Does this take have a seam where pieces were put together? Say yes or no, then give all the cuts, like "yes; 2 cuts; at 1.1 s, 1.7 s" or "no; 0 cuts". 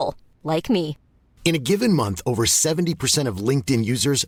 no; 0 cuts